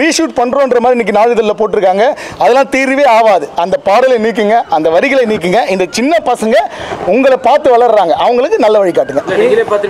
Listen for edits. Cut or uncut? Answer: uncut